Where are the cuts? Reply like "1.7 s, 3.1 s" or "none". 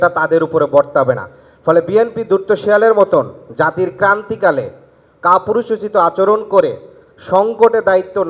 none